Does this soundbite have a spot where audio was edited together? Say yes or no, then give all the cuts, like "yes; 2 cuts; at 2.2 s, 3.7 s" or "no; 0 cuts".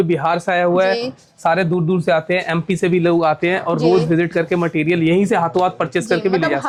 no; 0 cuts